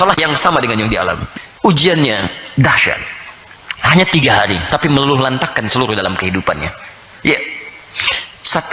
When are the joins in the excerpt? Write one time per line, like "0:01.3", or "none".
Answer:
0:01.2